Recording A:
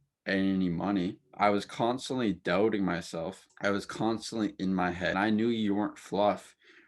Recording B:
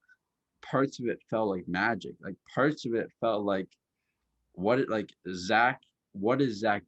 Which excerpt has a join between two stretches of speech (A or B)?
A